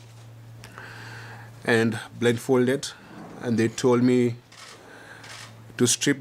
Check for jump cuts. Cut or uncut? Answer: uncut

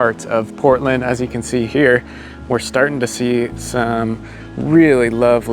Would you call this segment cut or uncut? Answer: uncut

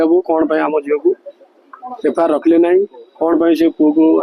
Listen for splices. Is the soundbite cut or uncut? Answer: uncut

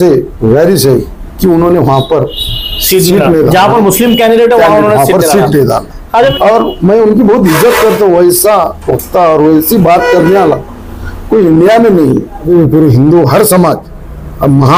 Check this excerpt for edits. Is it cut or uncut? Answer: cut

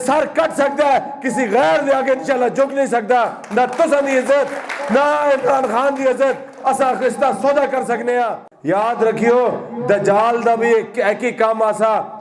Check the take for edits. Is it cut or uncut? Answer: cut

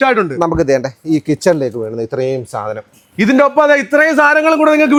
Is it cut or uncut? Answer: uncut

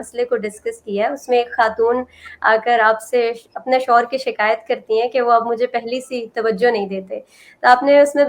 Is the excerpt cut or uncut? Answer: uncut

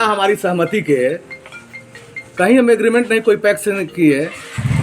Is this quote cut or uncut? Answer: uncut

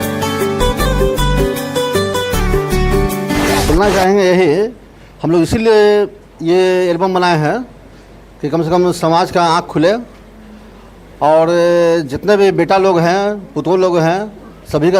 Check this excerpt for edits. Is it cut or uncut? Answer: cut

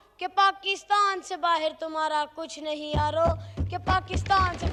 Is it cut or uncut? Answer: uncut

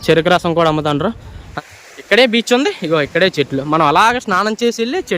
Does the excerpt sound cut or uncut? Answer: cut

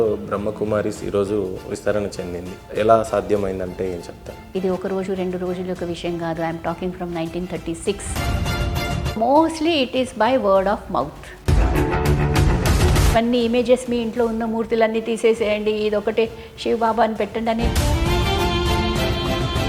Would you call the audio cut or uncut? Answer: uncut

